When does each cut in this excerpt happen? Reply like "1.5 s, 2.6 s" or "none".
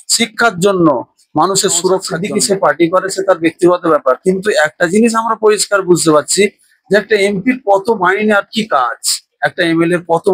2.1 s